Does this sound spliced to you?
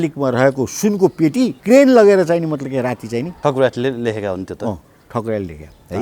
yes; 2 cuts; at 1.6 s, 3.3 s

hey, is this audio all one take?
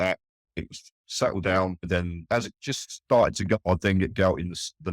no; 2 cuts; at 2.2 s, 3.6 s

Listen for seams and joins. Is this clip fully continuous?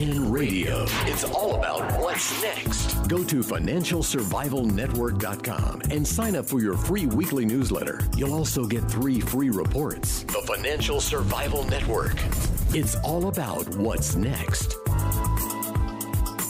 yes; 0 cuts

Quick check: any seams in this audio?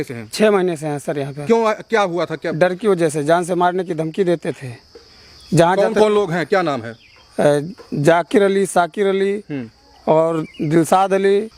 no; 0 cuts

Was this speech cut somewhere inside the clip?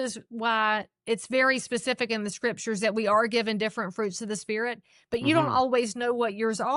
no; 0 cuts

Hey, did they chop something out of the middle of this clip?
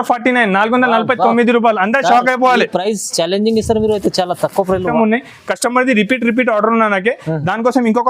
yes; 1 cut; at 4.9 s

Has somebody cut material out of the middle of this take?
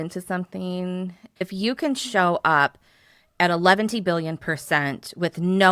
yes; 1 cut; at 1.4 s

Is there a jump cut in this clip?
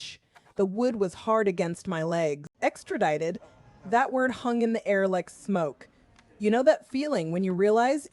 yes; 1 cut; at 2.5 s

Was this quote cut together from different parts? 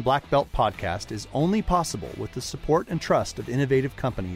no; 0 cuts

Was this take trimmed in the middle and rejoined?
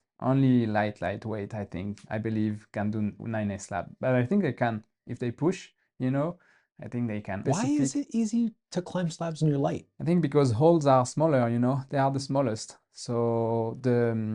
yes; 2 cuts; at 7.4 s, 9.9 s

